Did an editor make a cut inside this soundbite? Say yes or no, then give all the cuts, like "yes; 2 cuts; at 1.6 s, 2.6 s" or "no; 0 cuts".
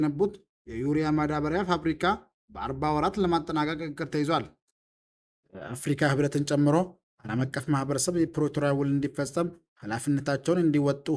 yes; 1 cut; at 5.3 s